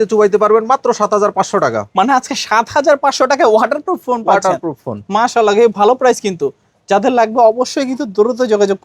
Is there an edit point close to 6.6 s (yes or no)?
no